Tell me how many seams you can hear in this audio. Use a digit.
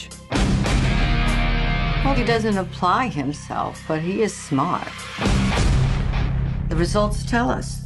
1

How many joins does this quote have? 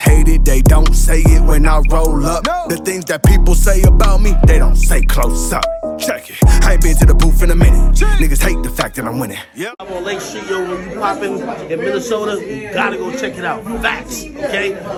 0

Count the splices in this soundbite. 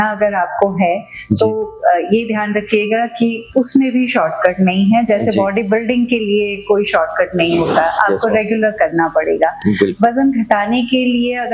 0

